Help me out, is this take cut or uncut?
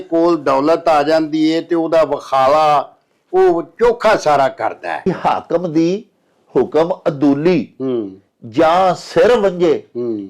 cut